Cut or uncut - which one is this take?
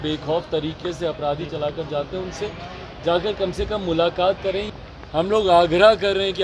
cut